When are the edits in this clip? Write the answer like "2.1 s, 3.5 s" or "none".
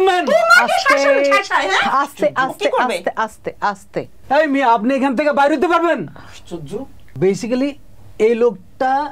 4.2 s, 7.1 s